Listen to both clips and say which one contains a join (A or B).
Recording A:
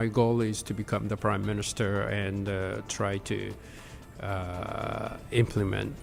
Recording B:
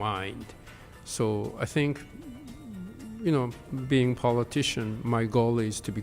B